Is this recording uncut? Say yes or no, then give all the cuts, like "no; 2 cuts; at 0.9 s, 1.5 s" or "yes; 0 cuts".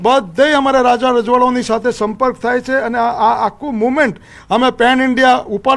yes; 0 cuts